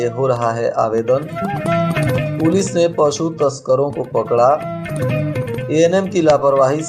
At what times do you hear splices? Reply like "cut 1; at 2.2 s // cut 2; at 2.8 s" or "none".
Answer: none